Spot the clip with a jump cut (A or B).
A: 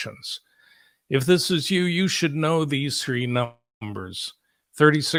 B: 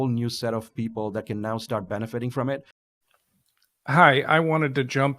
B